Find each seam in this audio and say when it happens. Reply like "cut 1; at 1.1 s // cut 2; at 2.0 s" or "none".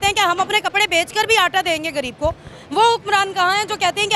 none